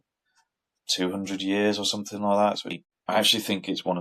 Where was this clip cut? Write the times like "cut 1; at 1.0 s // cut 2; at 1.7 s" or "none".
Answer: cut 1; at 2.7 s